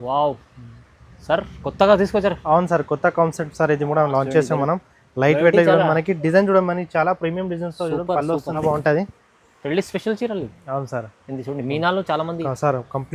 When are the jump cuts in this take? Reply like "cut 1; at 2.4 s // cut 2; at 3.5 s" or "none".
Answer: cut 1; at 8.6 s